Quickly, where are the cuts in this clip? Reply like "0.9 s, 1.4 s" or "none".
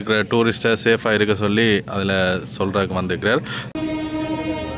3.6 s